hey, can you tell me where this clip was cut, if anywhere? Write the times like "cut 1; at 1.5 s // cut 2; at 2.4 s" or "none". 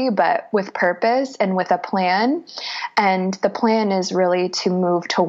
none